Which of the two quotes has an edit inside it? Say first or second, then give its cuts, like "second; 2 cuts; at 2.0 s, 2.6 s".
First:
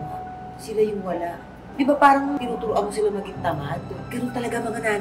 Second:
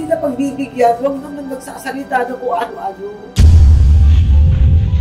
first; 3 cuts; at 1.6 s, 2.4 s, 4.0 s